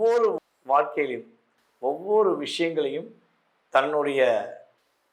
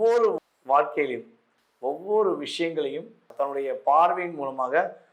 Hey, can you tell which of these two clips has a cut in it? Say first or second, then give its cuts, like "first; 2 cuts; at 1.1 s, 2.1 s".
second; 1 cut; at 3.3 s